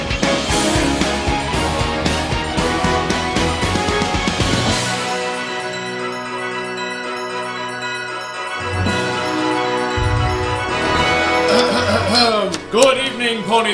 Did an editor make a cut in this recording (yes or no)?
yes